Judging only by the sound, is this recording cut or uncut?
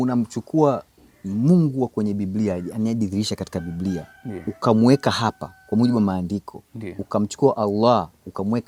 uncut